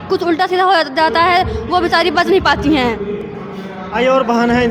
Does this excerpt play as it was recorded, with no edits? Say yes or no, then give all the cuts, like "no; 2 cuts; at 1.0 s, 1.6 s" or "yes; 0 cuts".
yes; 0 cuts